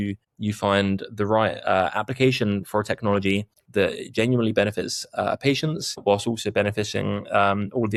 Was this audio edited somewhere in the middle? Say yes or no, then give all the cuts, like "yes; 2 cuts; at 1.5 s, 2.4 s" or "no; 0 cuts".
no; 0 cuts